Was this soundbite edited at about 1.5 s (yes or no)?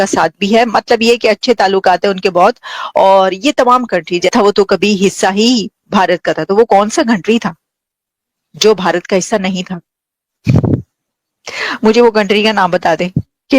no